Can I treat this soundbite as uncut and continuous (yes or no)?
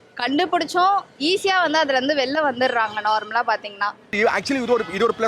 no